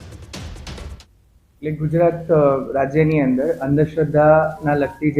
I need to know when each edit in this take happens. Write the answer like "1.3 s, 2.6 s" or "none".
0.9 s